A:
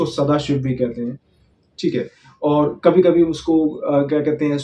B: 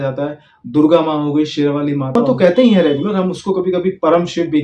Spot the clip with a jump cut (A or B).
B